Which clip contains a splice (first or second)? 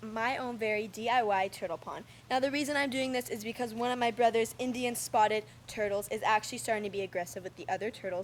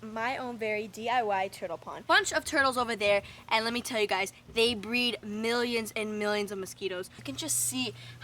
second